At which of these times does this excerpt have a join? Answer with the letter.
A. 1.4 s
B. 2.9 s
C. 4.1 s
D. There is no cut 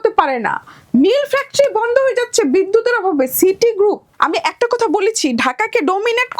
C